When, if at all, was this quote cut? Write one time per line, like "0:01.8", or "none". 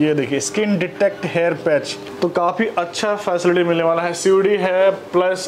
0:02.0